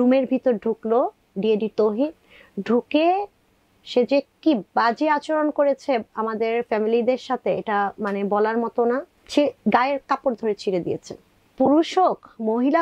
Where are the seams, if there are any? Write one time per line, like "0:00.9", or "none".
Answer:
0:09.2
0:11.4